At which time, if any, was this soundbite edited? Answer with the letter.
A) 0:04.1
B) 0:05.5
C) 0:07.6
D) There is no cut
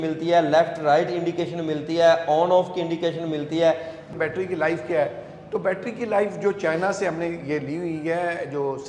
A